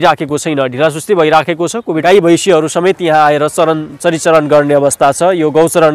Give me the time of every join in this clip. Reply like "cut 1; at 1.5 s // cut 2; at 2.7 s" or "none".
cut 1; at 2.0 s

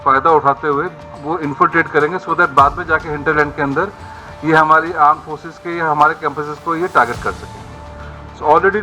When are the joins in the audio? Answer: none

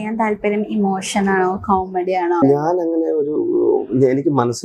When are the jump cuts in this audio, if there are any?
cut 1; at 2.4 s

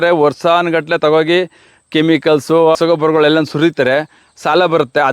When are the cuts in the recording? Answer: cut 1; at 2.8 s

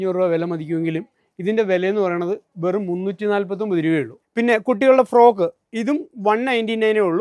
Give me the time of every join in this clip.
cut 1; at 4.2 s

